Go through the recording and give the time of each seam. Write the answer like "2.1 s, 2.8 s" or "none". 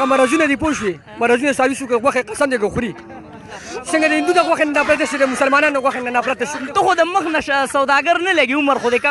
none